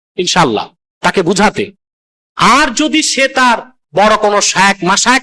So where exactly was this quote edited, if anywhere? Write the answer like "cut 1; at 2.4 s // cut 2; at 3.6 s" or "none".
cut 1; at 3.8 s